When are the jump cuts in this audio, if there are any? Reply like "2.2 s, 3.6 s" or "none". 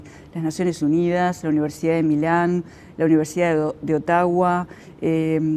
none